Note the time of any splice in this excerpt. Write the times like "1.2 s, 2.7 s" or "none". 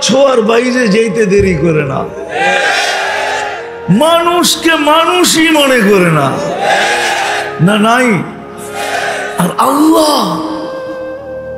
none